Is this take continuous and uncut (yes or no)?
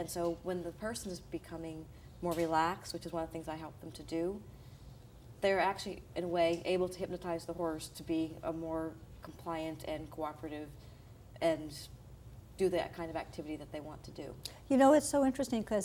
no